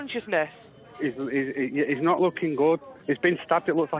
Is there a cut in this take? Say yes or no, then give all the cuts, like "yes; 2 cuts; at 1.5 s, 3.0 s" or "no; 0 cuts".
yes; 1 cut; at 2.9 s